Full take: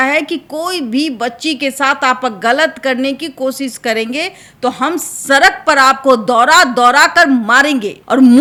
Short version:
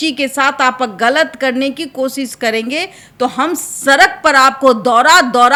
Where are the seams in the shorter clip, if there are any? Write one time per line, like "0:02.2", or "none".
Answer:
none